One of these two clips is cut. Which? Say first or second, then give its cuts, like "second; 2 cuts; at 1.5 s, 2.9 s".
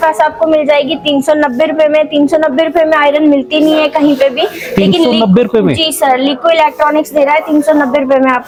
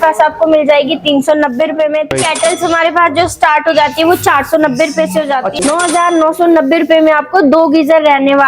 second; 2 cuts; at 2.1 s, 5.5 s